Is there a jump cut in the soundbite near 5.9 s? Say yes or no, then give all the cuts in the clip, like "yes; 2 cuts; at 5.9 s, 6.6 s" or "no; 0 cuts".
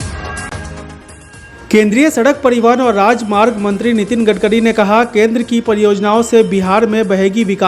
no; 1 cut; at 1.2 s